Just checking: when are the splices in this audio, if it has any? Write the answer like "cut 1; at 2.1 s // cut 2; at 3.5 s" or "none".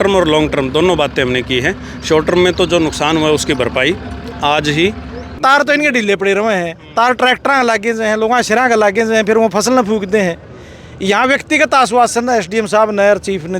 cut 1; at 5.4 s